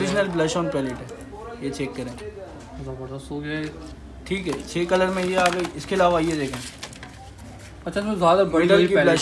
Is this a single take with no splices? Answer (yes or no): yes